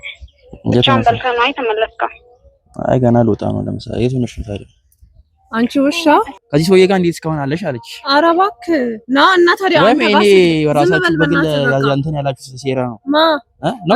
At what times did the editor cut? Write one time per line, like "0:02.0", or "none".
0:06.4